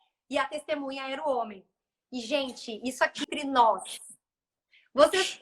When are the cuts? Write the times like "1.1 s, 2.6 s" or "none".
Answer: 3.3 s